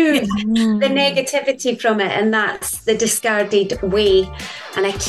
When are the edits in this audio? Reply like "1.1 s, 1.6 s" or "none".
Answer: none